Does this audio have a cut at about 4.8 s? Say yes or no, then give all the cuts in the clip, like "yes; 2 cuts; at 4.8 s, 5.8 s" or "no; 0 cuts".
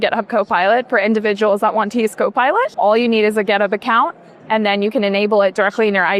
no; 1 cut; at 2.7 s